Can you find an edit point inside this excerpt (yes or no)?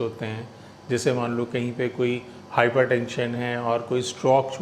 no